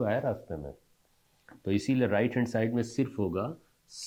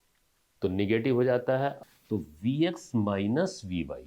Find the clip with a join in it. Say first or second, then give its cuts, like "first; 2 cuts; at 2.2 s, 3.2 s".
second; 1 cut; at 1.8 s